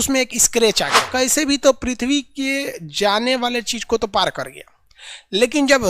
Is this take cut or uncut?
cut